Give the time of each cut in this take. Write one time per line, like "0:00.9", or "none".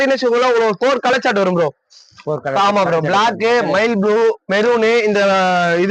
none